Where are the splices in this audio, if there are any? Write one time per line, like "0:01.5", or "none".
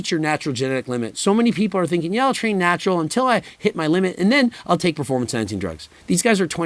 0:01.1